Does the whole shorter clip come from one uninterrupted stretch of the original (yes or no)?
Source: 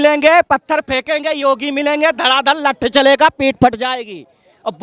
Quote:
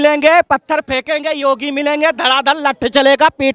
yes